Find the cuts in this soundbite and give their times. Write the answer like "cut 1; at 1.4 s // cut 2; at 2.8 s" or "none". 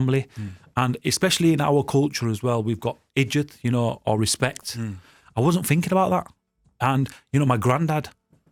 none